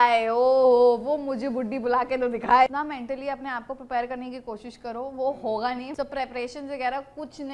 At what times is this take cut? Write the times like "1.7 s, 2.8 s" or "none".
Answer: 2.7 s, 5.9 s